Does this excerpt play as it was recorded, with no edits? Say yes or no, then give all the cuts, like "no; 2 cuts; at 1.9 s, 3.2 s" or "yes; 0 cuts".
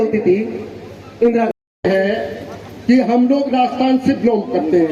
no; 1 cut; at 1.5 s